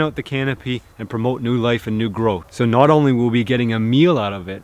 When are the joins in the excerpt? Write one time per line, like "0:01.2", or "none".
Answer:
none